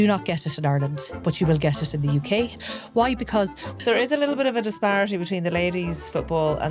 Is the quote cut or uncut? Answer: cut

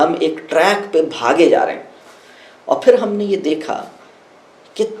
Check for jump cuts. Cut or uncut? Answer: uncut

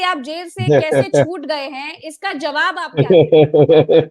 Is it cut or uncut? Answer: uncut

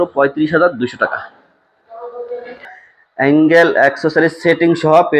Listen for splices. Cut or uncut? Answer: cut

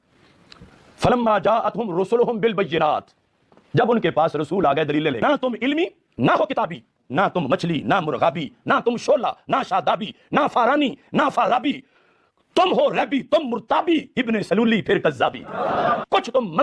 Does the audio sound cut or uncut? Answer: cut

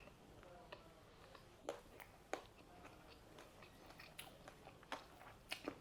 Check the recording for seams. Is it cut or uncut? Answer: uncut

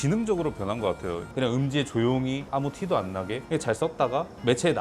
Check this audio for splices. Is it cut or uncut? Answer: cut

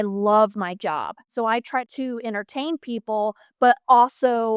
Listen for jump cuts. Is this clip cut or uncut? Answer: cut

